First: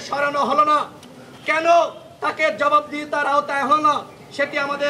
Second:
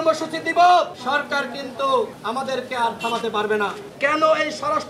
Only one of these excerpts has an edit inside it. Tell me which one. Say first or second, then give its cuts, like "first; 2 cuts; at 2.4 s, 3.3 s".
second; 3 cuts; at 1.0 s, 2.2 s, 3.8 s